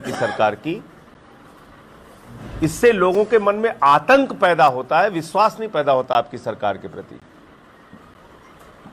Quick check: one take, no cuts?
yes; 0 cuts

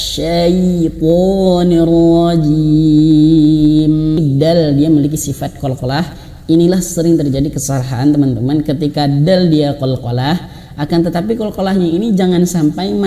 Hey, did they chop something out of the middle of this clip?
yes; 1 cut; at 4.2 s

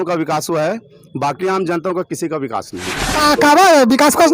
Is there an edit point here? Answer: yes; 1 cut; at 3.0 s

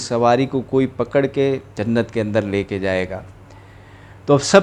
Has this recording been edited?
yes; 1 cut; at 1.7 s

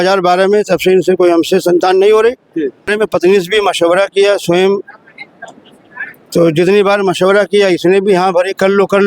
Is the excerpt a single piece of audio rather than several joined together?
no; 1 cut; at 2.9 s

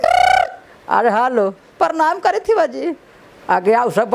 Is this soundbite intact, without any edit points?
yes; 0 cuts

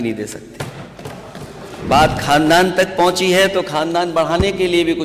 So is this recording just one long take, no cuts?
no; 1 cut; at 1.9 s

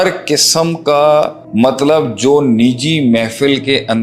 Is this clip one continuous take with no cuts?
no; 1 cut; at 1.4 s

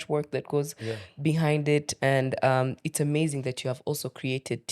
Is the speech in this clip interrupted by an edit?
no; 0 cuts

